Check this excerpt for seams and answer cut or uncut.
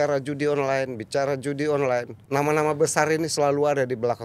cut